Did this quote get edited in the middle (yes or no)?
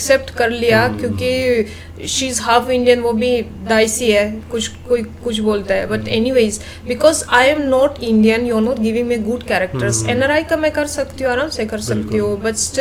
no